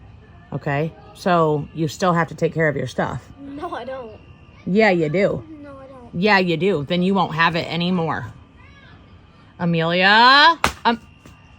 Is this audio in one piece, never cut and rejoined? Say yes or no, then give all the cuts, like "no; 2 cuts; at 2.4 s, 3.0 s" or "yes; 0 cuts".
no; 1 cut; at 10.5 s